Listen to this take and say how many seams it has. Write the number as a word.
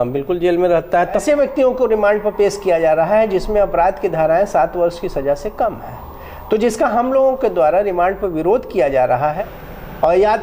two